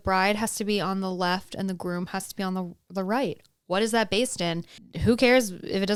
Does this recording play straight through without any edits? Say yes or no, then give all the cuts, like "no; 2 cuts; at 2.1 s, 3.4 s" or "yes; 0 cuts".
yes; 0 cuts